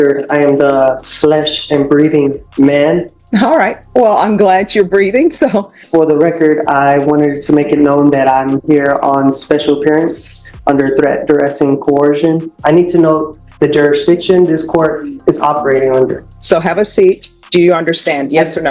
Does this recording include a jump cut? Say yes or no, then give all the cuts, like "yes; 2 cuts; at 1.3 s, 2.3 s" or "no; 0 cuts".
yes; 5 cuts; at 3.2 s, 5.8 s, 12.5 s, 16.3 s, 17.3 s